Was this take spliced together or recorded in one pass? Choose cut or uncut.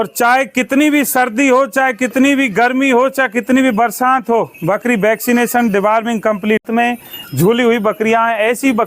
cut